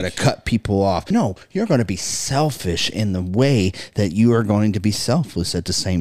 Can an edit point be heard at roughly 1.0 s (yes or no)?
yes